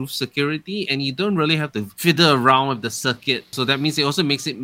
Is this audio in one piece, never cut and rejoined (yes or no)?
no